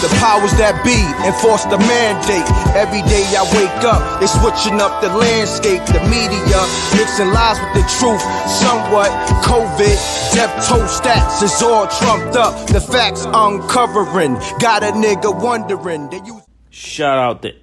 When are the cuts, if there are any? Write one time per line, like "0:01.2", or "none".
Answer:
0:16.2